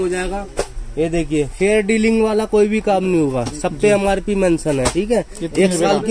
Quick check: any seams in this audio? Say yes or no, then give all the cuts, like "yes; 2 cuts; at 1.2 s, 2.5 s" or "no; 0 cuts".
no; 0 cuts